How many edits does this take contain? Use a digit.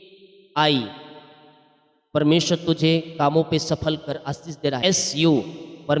1